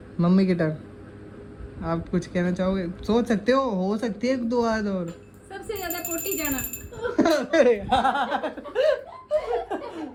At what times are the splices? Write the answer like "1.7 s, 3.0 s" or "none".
none

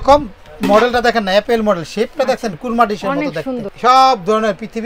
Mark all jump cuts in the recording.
3.7 s

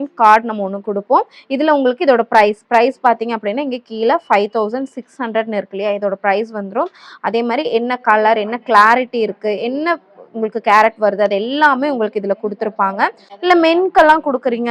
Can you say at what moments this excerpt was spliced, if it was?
13.3 s

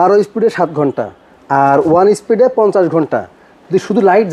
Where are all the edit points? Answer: none

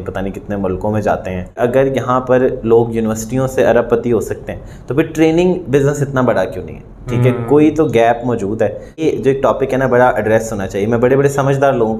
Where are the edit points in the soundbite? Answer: 1.6 s, 9.0 s

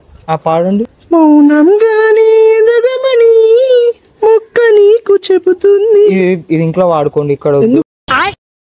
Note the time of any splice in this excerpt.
0.9 s

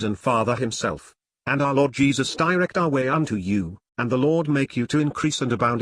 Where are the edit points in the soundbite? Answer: 2.7 s

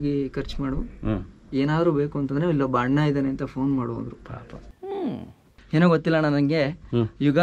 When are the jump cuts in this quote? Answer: 5.5 s

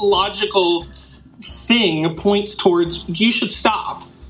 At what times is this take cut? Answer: none

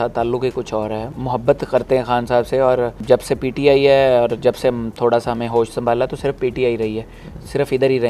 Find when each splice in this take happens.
1.1 s, 3.0 s

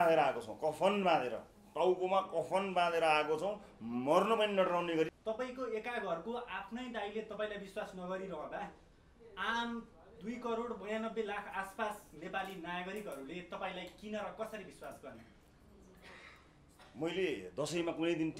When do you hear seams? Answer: 5.2 s

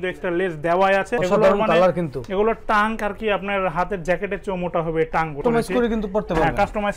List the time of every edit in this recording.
1.2 s, 5.4 s

